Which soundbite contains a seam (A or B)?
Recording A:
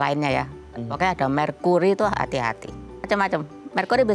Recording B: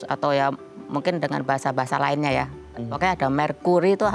A